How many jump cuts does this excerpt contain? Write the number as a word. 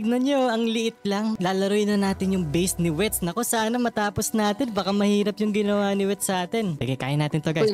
two